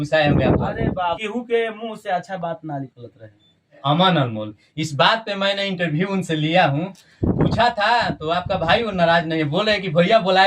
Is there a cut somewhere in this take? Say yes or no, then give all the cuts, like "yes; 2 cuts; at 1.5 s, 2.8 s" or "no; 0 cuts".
yes; 2 cuts; at 1.2 s, 3.8 s